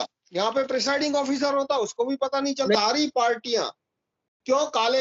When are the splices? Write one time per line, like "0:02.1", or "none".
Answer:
0:02.8

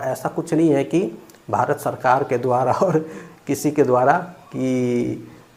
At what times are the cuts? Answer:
none

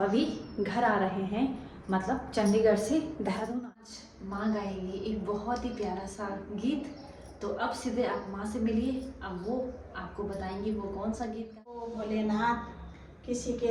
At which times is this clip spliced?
0:03.6
0:11.5

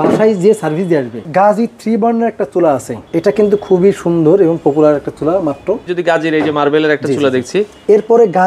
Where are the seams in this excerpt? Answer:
0:01.2
0:03.0
0:05.9

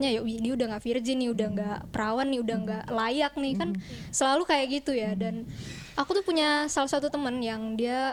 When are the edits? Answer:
none

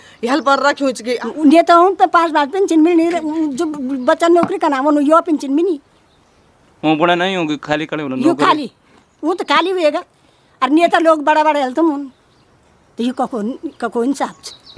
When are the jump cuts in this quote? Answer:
0:01.2

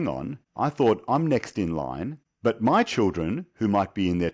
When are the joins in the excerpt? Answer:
none

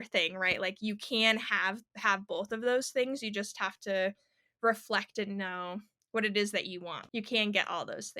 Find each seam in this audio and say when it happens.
0:06.9

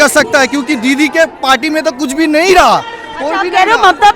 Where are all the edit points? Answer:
none

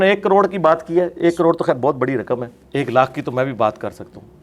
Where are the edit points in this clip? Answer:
0:02.6

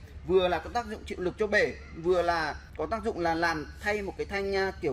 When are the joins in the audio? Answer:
0:02.6

